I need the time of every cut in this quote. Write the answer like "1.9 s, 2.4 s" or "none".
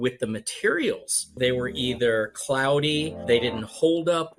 1.4 s, 3.2 s